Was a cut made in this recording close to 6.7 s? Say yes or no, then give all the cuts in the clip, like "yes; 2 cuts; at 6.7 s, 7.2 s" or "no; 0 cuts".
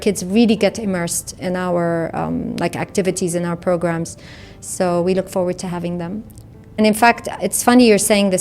yes; 1 cut; at 6.7 s